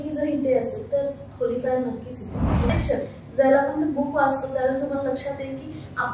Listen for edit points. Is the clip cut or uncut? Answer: cut